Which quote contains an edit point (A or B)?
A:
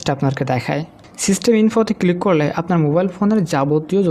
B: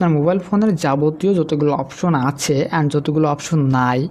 A